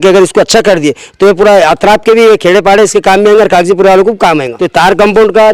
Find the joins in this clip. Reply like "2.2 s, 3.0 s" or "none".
4.5 s